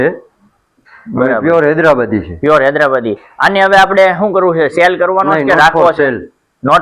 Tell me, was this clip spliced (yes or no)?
no